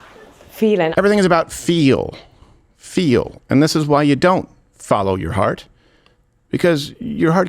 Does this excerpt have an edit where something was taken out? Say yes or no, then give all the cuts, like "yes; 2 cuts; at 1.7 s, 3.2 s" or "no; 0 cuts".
yes; 1 cut; at 0.9 s